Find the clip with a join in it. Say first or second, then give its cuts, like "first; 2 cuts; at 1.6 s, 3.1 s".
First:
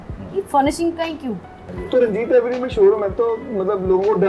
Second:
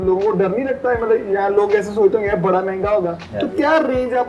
first; 1 cut; at 1.6 s